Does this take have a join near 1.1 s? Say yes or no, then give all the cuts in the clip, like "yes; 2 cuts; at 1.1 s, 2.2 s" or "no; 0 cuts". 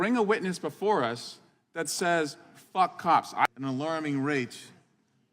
no; 1 cut; at 3.5 s